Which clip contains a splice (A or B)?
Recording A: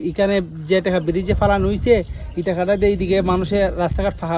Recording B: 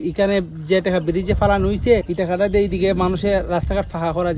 B